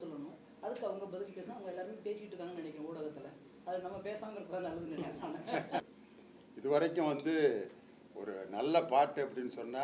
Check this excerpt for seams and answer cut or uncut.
cut